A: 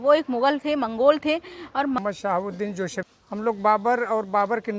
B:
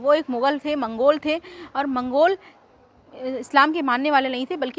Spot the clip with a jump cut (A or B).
A